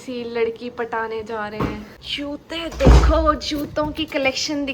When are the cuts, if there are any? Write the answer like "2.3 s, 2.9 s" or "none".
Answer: 1.9 s